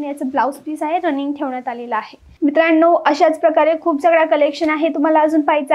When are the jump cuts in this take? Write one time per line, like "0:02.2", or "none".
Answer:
0:02.2